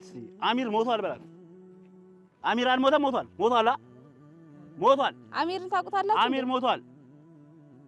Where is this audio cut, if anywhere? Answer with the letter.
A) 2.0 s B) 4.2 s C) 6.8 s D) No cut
C